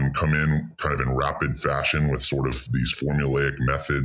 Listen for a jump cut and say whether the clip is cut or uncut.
uncut